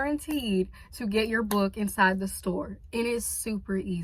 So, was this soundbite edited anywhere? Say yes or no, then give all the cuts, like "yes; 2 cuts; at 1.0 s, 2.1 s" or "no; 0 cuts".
no; 0 cuts